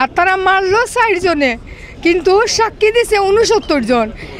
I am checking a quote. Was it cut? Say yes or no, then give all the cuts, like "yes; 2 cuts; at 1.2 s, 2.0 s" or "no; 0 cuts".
no; 0 cuts